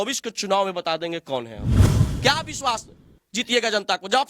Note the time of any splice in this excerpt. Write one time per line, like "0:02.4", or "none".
0:01.9